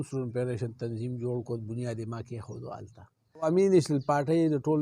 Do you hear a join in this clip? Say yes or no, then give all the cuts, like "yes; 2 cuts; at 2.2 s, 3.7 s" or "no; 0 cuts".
yes; 1 cut; at 3.4 s